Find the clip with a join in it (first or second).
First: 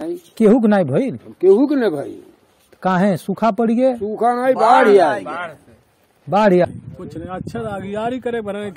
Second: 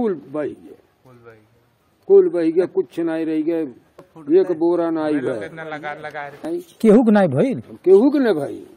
first